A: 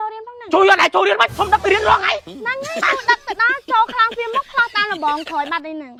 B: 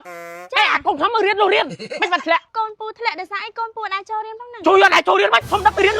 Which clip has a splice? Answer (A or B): B